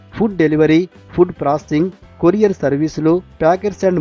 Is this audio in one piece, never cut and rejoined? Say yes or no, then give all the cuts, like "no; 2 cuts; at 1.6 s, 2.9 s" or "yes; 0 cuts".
yes; 0 cuts